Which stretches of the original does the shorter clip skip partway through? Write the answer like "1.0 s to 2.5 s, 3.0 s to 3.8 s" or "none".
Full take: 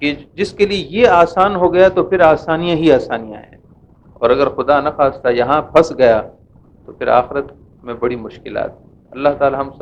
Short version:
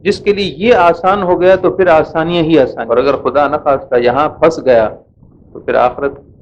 3.1 s to 4.1 s